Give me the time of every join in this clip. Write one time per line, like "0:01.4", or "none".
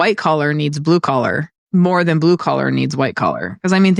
0:01.5